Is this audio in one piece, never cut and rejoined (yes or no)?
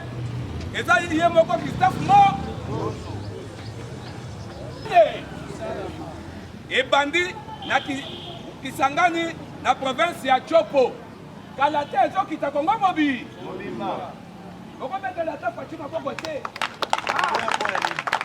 no